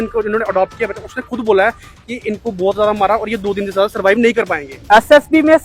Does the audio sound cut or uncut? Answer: cut